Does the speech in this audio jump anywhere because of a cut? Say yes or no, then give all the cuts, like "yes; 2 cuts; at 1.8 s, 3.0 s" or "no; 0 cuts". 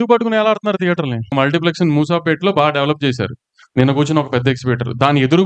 yes; 1 cut; at 1.3 s